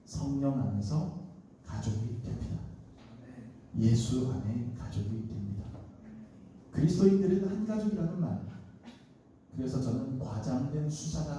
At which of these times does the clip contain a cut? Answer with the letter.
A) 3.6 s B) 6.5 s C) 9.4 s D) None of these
B